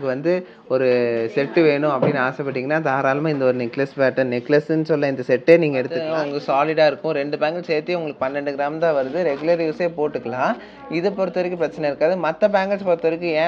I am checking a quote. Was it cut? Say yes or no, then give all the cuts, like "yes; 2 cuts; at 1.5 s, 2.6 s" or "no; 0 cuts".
yes; 1 cut; at 6.0 s